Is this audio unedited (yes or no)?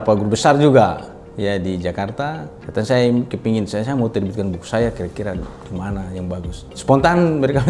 no